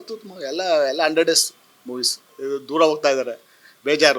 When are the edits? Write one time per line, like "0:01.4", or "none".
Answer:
0:02.3